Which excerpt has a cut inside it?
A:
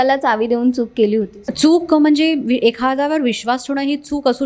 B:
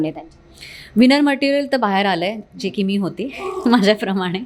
A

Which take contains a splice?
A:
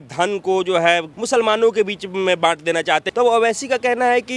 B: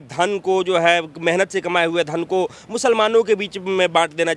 A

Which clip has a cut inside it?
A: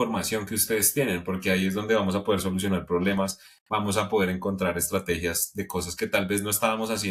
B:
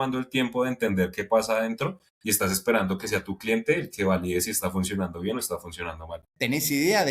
B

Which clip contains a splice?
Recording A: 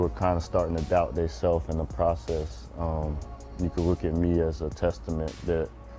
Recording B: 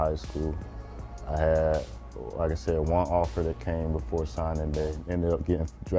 B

